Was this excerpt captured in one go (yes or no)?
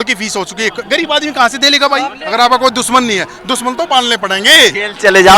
no